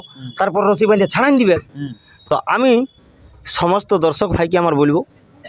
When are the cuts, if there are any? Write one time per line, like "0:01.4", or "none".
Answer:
none